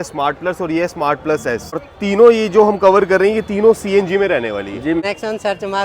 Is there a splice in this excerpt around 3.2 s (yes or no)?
no